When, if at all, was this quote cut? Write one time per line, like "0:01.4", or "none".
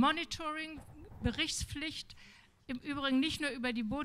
none